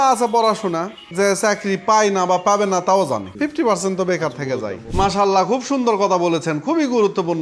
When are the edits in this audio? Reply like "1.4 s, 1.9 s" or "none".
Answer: 1.0 s, 3.3 s, 4.8 s